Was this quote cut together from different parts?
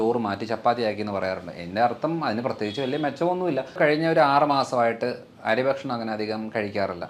yes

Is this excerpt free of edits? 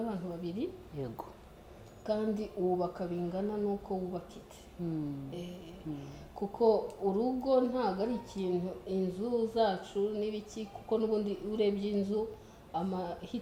yes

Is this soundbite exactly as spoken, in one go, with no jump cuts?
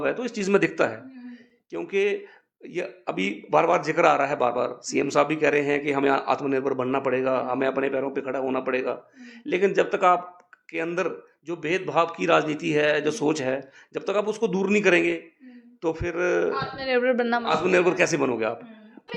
yes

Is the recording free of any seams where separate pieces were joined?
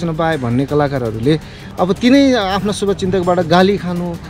no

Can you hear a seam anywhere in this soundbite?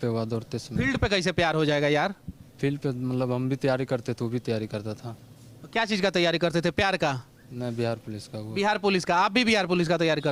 no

